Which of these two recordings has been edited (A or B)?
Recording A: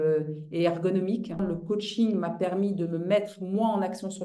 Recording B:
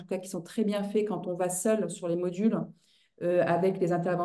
A